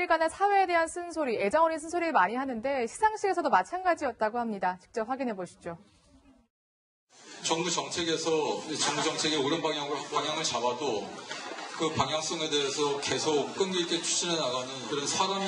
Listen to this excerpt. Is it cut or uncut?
cut